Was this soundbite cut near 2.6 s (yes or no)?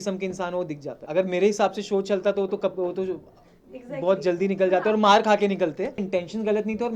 no